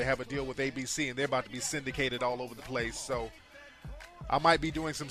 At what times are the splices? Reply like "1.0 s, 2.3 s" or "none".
2.4 s